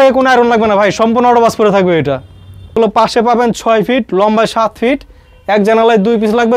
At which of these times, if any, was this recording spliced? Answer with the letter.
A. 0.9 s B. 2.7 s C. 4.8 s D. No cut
B